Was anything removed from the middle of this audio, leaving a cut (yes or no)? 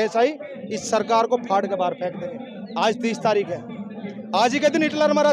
no